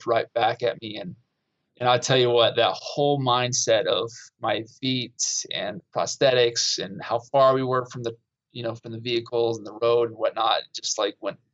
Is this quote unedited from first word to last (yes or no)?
yes